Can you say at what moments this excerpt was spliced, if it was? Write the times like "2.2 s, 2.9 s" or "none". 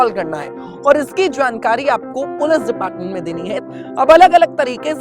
3.6 s